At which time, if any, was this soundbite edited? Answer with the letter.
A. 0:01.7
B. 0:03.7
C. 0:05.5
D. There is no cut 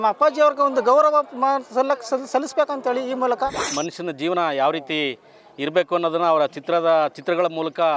B